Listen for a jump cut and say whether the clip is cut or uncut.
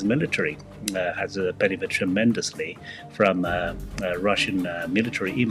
uncut